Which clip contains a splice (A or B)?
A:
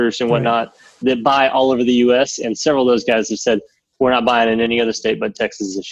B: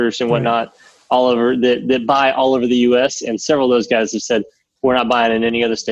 A